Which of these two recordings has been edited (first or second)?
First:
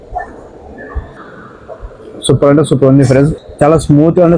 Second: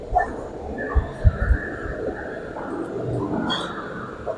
first